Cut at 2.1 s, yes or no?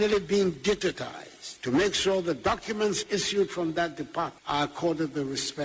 no